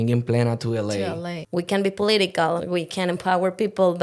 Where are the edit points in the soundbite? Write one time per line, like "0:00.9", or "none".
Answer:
0:01.3
0:02.6